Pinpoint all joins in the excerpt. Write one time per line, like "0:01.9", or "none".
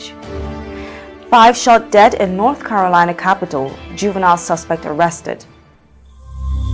0:05.7